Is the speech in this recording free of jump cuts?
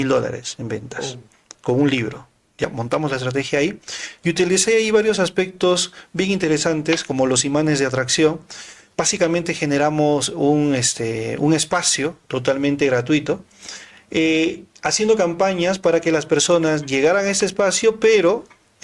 no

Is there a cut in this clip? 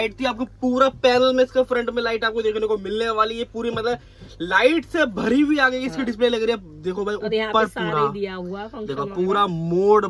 no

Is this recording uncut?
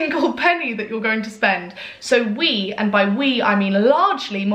yes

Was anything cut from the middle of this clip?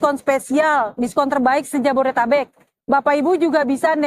no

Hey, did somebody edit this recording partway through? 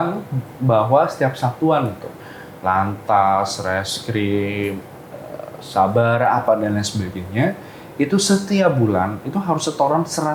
no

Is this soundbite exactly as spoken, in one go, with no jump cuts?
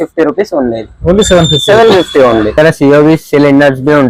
no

